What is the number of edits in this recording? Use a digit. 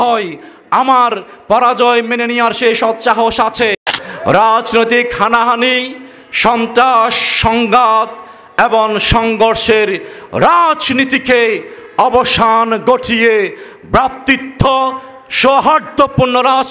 1